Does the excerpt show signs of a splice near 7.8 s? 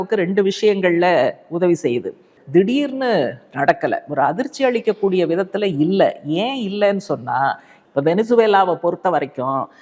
yes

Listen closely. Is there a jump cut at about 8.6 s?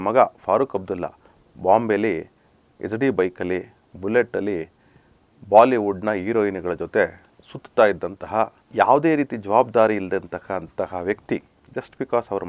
yes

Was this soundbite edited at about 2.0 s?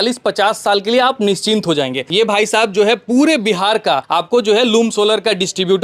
yes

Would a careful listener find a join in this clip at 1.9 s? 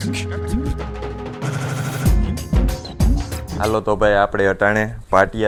no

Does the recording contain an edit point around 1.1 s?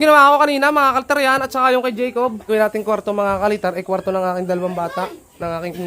no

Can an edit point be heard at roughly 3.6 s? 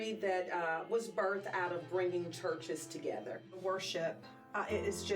yes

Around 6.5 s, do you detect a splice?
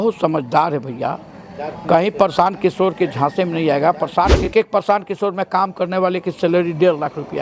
no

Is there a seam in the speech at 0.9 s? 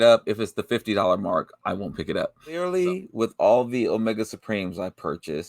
no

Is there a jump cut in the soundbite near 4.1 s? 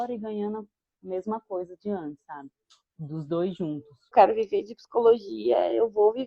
yes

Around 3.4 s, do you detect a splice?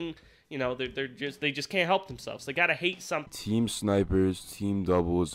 yes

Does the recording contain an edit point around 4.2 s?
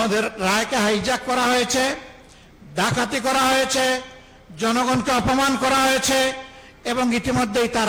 no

